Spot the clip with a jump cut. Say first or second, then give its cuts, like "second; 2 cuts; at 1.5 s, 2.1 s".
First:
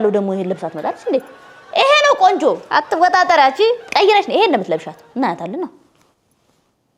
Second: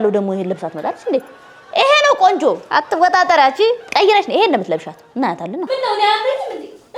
second; 1 cut; at 5.7 s